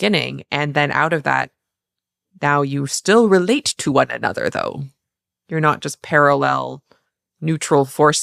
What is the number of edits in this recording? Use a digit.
0